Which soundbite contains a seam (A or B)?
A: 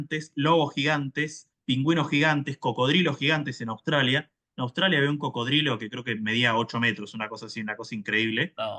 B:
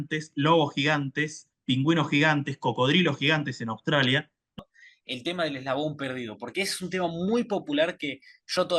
B